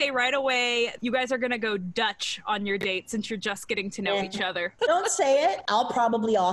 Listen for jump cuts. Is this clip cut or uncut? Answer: uncut